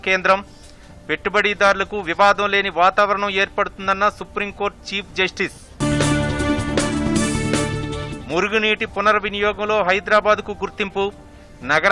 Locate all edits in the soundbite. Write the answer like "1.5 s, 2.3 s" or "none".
none